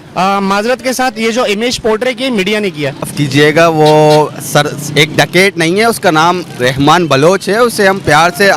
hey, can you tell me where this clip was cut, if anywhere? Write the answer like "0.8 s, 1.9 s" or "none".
3.1 s

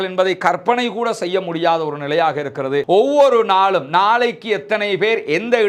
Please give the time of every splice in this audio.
2.8 s

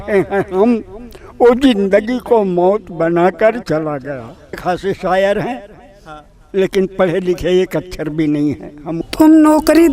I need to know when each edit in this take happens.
4.5 s, 9.0 s

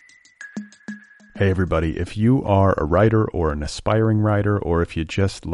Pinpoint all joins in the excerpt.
0.9 s

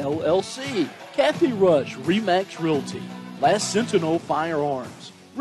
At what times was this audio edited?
1.0 s

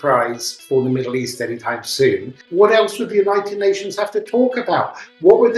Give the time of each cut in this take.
2.4 s

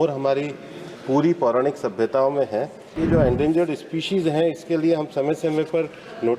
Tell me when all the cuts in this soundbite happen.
2.9 s

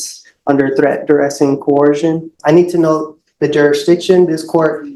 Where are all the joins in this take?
2.3 s

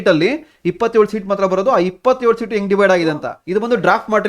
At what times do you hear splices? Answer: 3.3 s

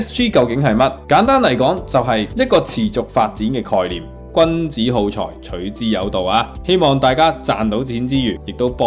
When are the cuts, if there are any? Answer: 4.1 s

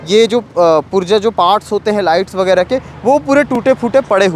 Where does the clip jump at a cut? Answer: none

